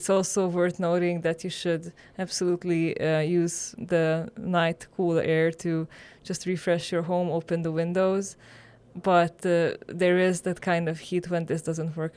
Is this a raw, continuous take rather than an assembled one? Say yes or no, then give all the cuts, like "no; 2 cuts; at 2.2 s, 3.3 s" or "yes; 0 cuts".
yes; 0 cuts